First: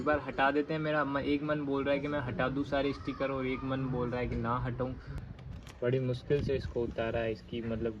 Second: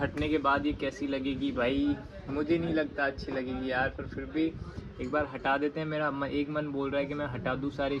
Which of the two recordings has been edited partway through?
first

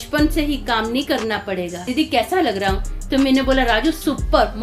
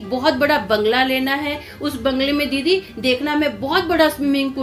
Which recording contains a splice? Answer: first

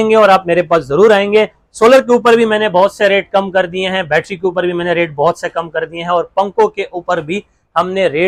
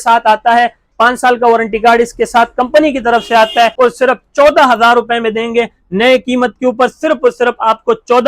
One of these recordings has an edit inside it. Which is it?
second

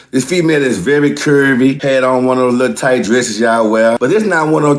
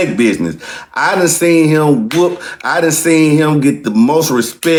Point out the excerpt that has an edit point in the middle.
first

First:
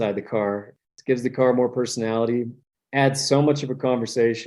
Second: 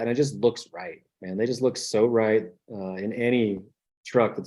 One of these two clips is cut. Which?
first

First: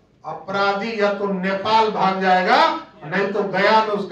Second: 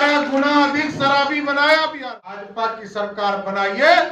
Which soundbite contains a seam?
second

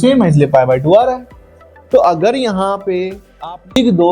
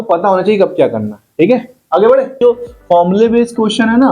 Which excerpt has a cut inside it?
second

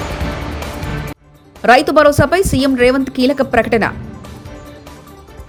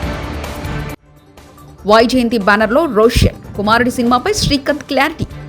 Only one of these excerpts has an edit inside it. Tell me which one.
second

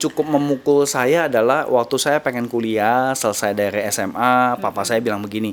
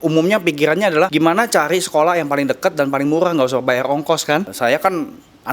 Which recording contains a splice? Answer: second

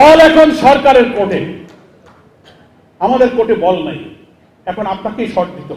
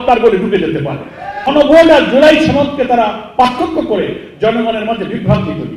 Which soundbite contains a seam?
second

